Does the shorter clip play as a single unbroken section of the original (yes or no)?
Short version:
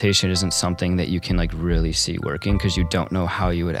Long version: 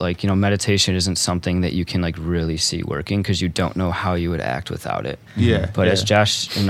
yes